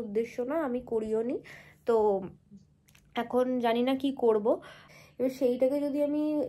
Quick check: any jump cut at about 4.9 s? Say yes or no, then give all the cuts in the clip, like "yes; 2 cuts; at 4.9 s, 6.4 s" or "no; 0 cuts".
yes; 1 cut; at 4.9 s